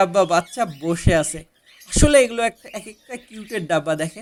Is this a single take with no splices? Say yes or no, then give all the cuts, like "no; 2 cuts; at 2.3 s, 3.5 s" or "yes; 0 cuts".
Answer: yes; 0 cuts